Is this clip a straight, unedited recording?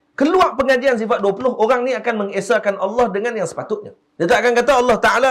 no; 1 cut; at 4.0 s

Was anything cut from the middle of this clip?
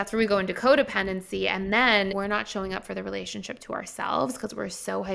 yes; 1 cut; at 2.1 s

